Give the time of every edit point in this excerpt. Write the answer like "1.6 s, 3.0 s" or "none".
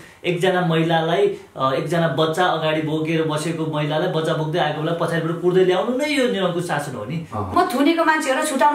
7.5 s